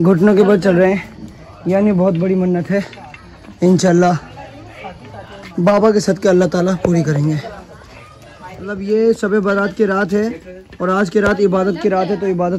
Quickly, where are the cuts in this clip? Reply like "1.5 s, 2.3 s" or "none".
none

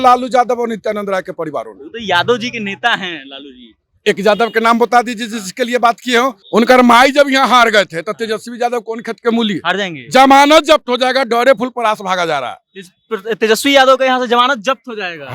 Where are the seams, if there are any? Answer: 6.4 s

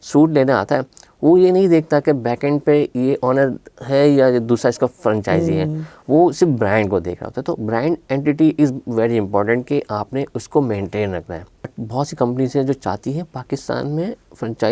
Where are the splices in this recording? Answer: 11.8 s

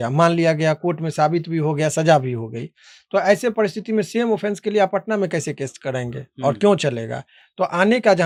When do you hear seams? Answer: none

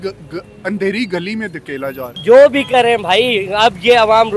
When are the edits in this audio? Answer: 2.1 s

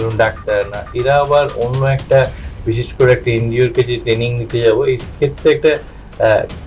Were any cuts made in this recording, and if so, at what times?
none

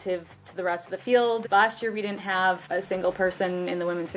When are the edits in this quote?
1.4 s, 2.6 s

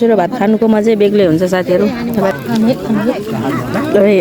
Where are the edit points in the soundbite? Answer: 2.3 s

